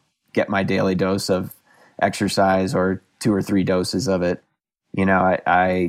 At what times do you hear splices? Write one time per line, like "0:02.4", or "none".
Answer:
0:04.5